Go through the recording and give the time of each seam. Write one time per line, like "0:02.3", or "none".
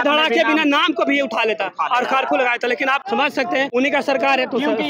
0:03.4